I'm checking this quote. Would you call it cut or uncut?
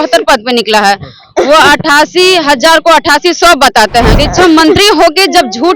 cut